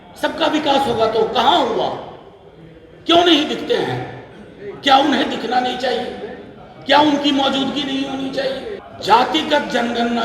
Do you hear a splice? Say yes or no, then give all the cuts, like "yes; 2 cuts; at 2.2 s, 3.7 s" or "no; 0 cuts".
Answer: yes; 1 cut; at 8.8 s